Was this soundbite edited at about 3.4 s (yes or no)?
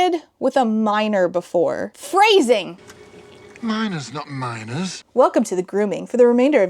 no